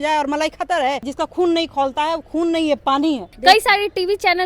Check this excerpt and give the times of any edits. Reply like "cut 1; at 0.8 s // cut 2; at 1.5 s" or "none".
cut 1; at 1.1 s // cut 2; at 3.3 s